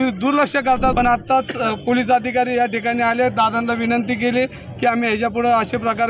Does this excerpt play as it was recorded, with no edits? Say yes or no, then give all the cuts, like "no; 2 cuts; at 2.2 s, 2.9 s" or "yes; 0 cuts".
no; 1 cut; at 0.9 s